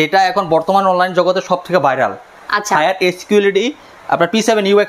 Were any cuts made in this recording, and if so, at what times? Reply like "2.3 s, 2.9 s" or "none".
none